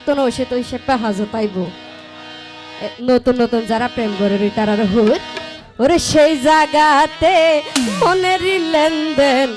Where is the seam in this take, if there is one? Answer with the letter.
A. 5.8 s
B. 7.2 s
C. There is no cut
C